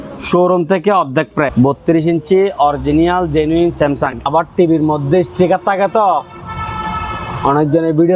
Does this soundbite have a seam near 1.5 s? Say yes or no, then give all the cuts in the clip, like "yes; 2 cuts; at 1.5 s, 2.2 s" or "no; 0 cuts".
yes; 2 cuts; at 1.5 s, 4.3 s